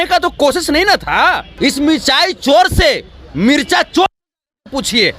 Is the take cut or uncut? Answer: cut